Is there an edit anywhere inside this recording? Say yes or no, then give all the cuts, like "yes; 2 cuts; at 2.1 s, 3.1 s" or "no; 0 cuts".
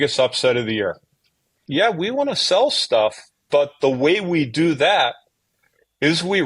yes; 1 cut; at 1.6 s